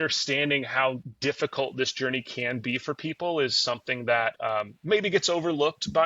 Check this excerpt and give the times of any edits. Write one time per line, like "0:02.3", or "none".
0:01.1
0:04.4

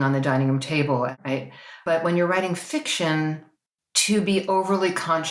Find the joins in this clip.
0:01.1

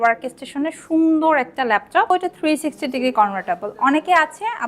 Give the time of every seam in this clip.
0:02.1

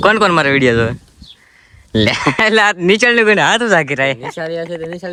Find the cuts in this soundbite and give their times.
none

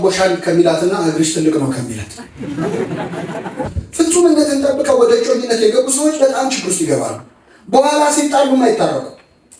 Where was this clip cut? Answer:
0:03.8

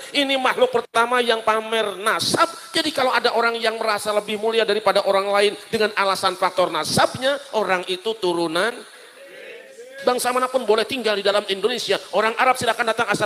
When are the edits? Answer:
0:10.0

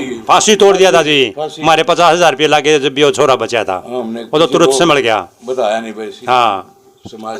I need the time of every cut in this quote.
none

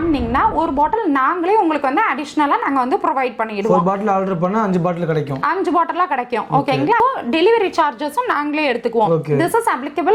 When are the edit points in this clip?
none

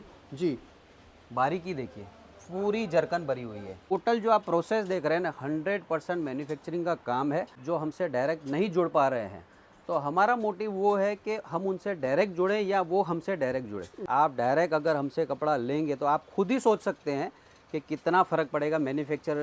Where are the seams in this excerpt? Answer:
0:03.9
0:07.6
0:13.9

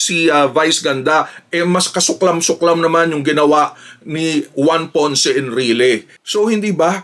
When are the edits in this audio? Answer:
0:06.1

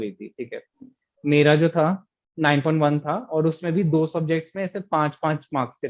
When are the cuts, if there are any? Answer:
none

